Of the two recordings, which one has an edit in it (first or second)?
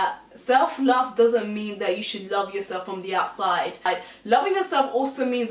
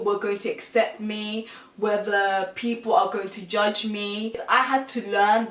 second